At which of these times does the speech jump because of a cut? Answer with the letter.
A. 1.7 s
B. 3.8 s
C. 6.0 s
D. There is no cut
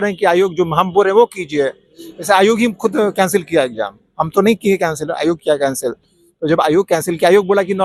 D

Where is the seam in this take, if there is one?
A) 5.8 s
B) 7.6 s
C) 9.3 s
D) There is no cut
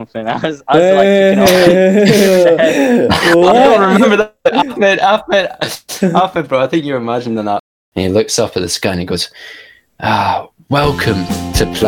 B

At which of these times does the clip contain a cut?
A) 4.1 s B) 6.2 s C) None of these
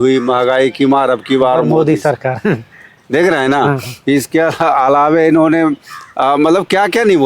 C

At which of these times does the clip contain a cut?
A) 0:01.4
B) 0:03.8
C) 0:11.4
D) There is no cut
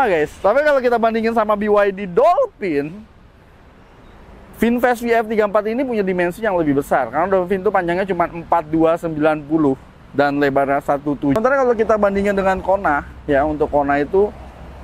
C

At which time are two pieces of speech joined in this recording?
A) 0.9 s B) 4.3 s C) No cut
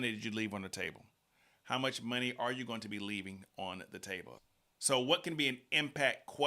B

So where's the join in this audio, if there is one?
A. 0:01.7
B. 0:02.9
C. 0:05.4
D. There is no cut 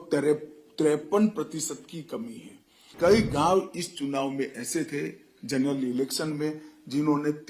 B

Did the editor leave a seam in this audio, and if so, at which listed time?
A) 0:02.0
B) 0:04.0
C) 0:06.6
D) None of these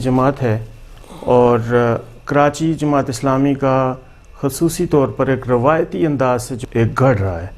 C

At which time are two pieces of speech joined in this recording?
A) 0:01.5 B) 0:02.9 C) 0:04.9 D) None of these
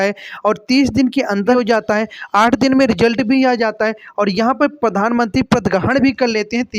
A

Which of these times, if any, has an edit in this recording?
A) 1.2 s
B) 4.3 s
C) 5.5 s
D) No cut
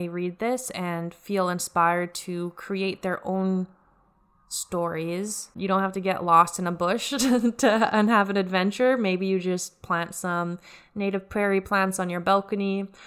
C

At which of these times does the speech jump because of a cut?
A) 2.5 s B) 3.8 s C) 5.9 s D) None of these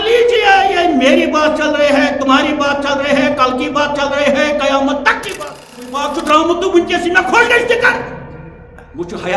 C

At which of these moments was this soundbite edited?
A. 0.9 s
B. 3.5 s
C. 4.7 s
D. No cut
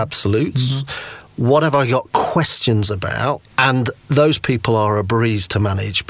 B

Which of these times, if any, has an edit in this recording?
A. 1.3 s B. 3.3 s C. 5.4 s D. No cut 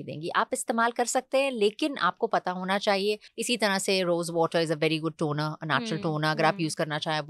B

